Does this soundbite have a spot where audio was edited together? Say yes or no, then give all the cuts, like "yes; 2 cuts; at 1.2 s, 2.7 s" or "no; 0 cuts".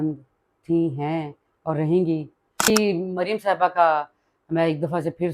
yes; 1 cut; at 2.7 s